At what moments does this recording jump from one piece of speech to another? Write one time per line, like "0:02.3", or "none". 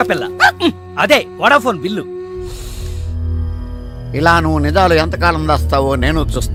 none